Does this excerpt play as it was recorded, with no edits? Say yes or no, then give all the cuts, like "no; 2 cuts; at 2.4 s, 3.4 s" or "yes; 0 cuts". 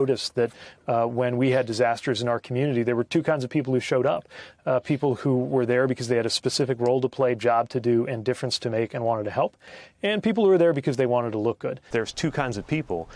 no; 1 cut; at 11.8 s